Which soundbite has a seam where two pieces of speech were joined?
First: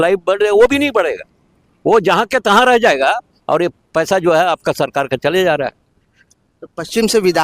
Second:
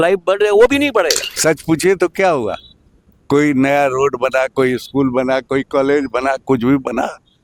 second; 1 cut; at 1.2 s

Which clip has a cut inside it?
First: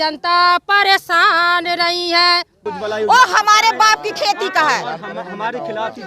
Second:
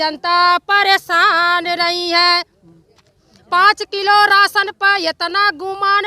first; 1 cut; at 2.7 s

